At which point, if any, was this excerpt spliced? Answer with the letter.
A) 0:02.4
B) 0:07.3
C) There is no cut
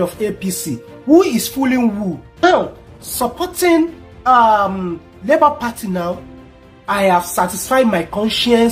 A